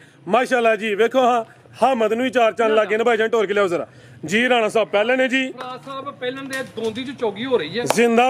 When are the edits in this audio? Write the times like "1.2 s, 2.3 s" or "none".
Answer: none